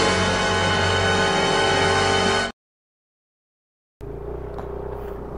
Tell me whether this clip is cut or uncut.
uncut